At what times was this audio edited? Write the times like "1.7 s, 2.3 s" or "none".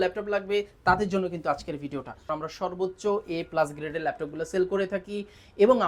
2.3 s